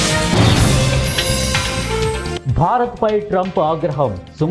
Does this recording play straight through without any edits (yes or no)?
yes